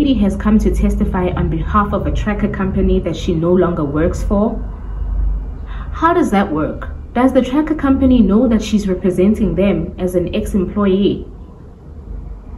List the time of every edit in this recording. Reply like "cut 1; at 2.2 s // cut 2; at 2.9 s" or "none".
none